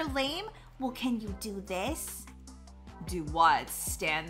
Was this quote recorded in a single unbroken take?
yes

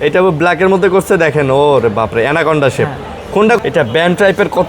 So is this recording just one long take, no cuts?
no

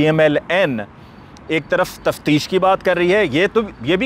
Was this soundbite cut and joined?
no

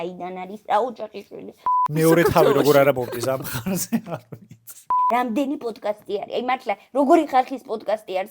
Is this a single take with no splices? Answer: no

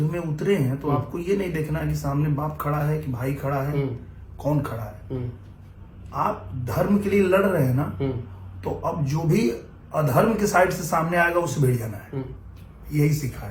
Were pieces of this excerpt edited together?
no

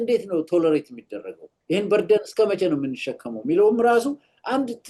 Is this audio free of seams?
yes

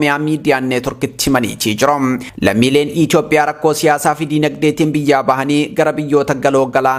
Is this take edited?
no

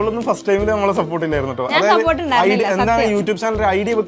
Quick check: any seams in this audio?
no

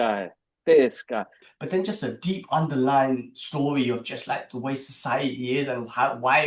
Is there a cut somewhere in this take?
yes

